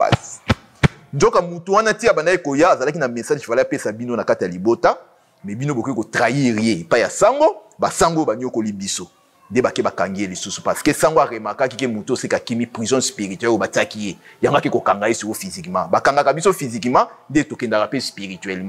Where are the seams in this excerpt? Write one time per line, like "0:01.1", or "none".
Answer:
none